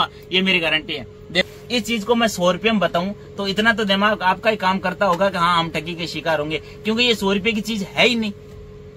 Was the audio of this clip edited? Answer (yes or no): yes